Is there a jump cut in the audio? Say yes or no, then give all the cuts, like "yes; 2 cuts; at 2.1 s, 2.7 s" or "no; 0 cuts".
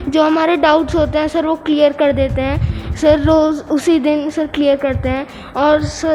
no; 0 cuts